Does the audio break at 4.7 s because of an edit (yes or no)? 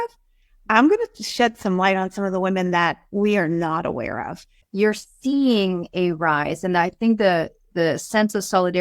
yes